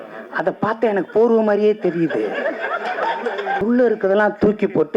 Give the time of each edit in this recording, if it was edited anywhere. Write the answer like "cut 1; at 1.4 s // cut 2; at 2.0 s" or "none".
cut 1; at 3.6 s

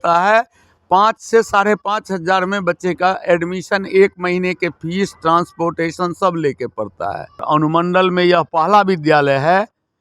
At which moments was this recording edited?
cut 1; at 7.4 s

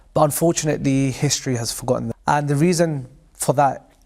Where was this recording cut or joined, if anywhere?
cut 1; at 2.1 s

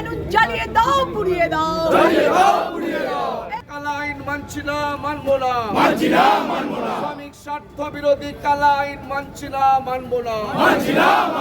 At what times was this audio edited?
cut 1; at 3.7 s

